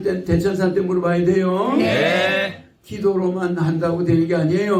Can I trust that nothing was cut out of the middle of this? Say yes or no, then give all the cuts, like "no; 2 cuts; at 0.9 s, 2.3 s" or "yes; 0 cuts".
yes; 0 cuts